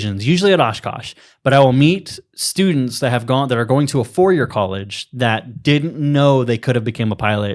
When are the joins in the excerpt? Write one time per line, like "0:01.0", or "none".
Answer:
none